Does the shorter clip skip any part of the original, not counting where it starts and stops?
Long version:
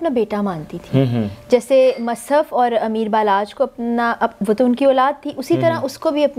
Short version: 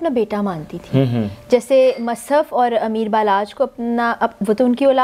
no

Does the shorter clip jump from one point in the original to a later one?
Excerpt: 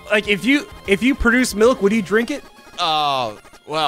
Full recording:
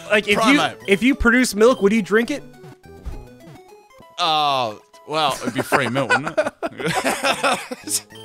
yes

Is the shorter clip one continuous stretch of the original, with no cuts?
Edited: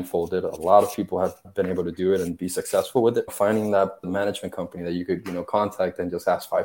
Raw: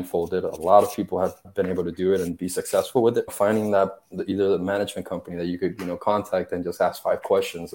no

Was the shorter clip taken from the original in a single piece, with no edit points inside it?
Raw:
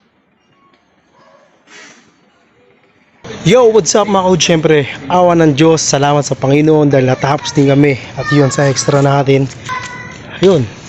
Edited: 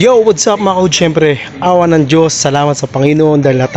yes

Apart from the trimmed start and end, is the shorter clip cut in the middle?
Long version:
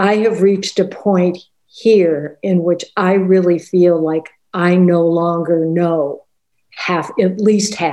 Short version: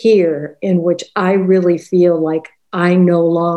no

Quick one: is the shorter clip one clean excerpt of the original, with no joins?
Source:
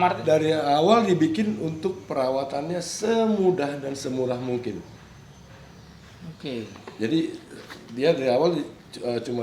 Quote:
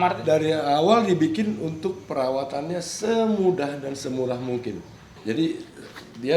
no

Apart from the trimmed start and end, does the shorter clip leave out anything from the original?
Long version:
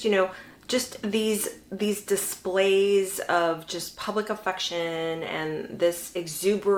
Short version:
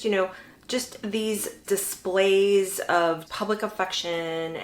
yes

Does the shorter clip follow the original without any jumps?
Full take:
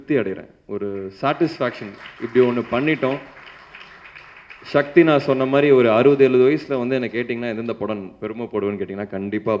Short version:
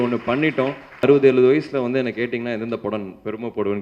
no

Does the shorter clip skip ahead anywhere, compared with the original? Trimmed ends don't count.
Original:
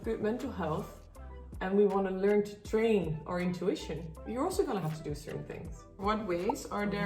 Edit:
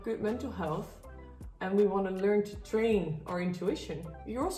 no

